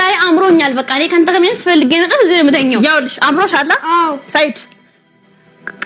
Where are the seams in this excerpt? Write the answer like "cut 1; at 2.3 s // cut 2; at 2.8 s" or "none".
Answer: none